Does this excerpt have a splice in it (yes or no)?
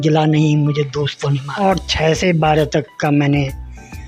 yes